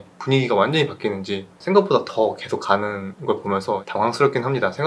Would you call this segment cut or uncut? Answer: cut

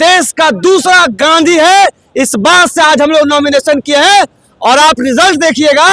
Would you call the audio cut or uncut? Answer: uncut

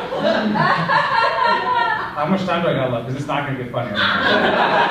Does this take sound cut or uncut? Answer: uncut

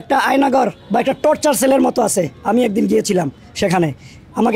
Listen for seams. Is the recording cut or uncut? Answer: uncut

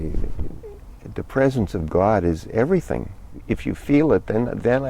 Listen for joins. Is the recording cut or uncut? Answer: cut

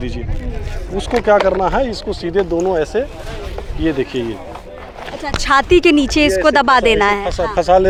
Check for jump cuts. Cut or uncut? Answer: uncut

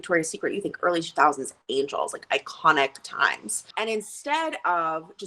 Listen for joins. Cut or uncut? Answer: cut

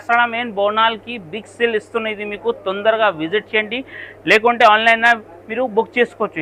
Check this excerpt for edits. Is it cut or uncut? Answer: uncut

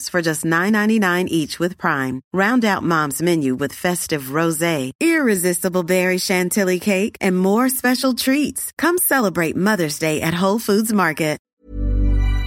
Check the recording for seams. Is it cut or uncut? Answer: cut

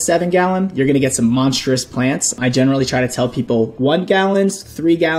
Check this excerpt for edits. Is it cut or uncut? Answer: cut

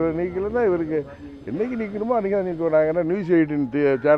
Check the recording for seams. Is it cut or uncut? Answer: uncut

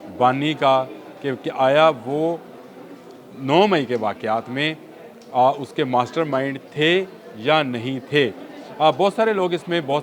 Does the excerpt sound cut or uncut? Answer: uncut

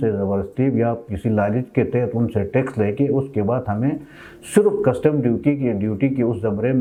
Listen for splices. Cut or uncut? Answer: uncut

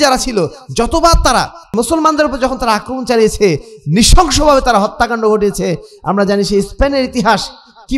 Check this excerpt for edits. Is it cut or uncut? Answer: cut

